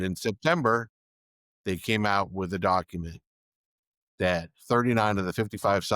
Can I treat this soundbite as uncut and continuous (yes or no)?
yes